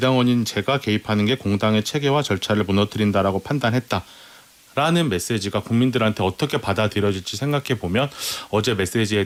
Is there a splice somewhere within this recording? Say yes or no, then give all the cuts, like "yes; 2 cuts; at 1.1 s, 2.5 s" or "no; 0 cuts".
no; 0 cuts